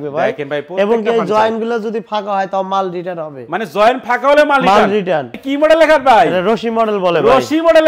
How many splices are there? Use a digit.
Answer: 1